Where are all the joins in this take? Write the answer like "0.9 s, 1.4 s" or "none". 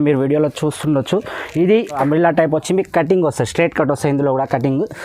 2.0 s